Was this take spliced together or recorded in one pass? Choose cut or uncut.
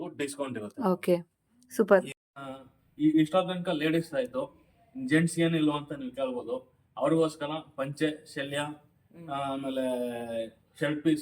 cut